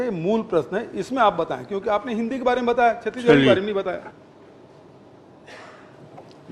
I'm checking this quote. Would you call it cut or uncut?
uncut